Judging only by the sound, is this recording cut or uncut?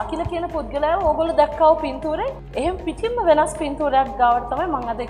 cut